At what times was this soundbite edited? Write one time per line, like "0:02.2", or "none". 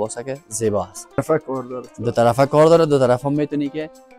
0:01.2